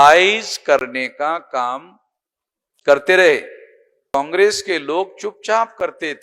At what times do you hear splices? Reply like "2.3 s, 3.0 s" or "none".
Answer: 4.1 s